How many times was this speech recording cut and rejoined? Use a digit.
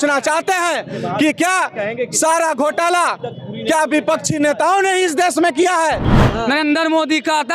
1